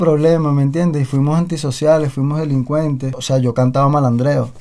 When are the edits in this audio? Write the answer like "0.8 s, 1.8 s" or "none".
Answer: 3.2 s